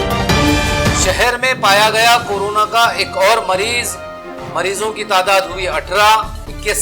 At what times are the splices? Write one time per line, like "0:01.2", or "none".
0:00.9